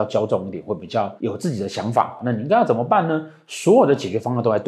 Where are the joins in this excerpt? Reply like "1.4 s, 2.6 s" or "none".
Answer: none